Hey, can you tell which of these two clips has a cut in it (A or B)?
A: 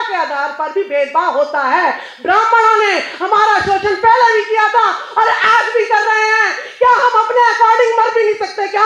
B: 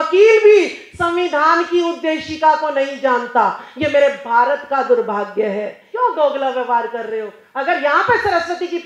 B